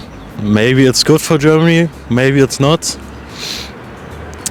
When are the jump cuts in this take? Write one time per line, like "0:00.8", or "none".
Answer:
none